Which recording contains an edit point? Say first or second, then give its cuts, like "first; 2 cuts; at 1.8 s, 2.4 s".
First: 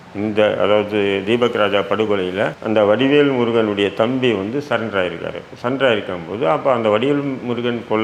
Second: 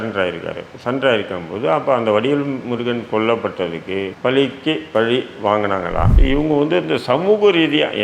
second; 1 cut; at 6.1 s